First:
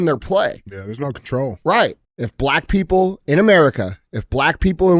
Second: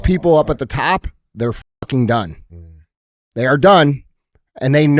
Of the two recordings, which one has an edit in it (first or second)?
first